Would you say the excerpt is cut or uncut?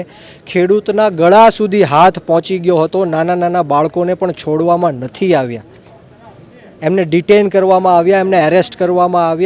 uncut